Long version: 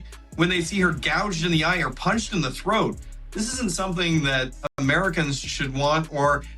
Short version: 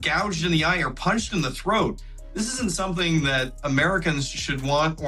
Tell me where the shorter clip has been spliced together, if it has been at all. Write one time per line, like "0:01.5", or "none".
0:03.6